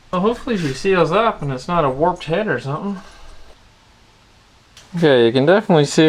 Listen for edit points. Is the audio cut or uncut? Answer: uncut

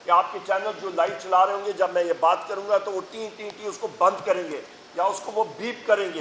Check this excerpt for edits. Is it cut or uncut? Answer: uncut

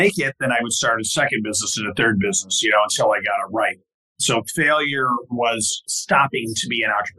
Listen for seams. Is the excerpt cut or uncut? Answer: cut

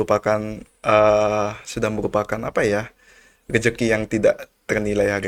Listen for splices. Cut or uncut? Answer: uncut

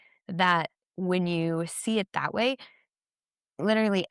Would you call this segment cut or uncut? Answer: uncut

